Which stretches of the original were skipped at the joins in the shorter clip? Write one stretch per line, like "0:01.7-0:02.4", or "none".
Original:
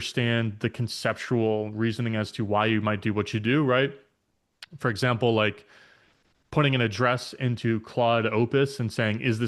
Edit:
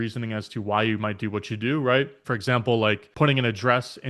0:04.0-0:04.7
0:05.6-0:06.4